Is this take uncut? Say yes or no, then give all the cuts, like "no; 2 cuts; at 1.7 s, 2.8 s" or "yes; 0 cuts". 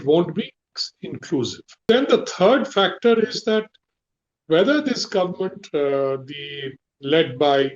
no; 1 cut; at 1.8 s